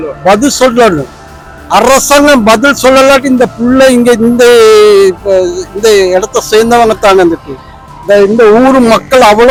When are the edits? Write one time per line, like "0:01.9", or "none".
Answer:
none